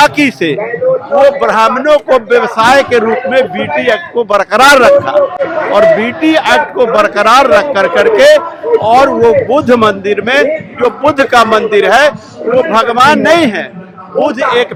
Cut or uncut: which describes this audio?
uncut